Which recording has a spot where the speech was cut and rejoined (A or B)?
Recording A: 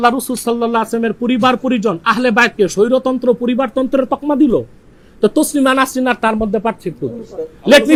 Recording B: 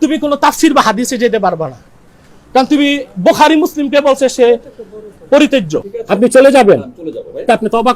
B